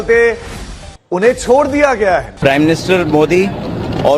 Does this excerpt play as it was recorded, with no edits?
no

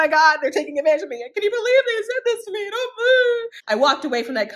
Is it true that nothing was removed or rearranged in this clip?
no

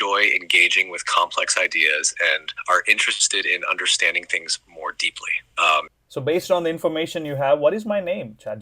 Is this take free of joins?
no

